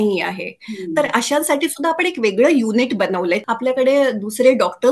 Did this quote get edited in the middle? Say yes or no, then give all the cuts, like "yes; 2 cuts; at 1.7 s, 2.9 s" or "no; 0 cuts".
yes; 1 cut; at 3.4 s